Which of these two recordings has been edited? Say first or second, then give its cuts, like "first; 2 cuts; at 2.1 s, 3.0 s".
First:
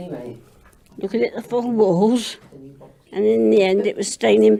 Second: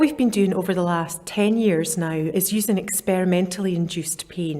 second; 2 cuts; at 1.2 s, 2.3 s